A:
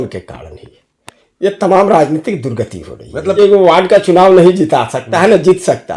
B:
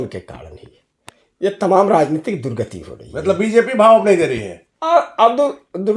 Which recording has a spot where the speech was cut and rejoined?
A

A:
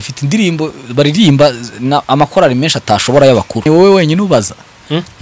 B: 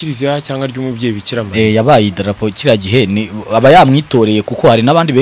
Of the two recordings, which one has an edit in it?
A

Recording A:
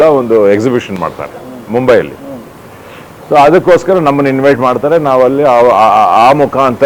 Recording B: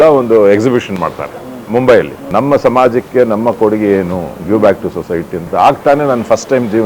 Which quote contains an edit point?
B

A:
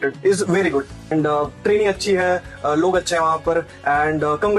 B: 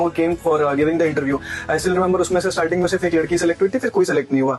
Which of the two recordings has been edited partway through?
A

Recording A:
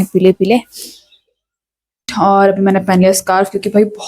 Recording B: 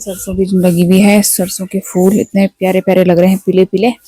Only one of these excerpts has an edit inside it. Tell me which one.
A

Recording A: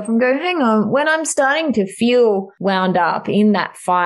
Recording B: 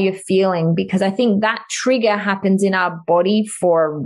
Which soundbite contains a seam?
A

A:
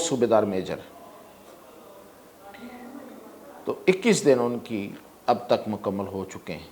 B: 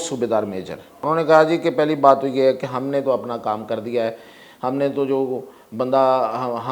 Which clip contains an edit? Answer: B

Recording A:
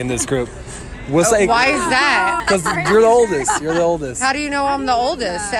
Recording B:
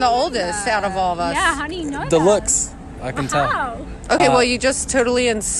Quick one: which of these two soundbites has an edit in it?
A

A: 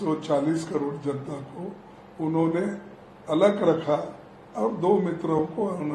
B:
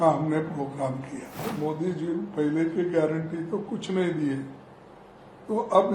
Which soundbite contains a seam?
B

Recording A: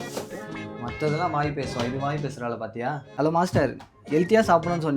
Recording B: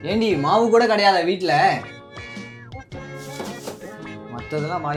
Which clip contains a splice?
A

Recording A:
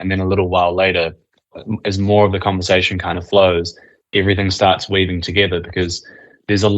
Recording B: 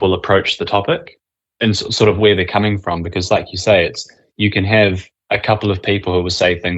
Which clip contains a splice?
A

